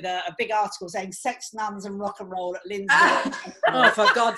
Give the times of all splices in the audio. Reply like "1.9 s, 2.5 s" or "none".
none